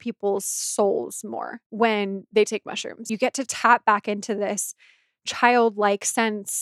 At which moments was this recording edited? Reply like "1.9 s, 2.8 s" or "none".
1.6 s, 3.0 s